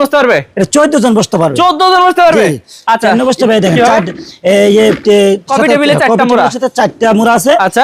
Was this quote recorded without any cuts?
yes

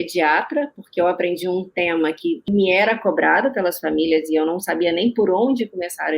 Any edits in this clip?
yes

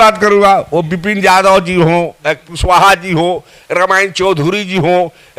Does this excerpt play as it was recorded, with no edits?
yes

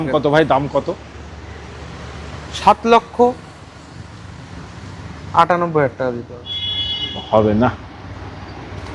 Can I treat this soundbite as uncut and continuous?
yes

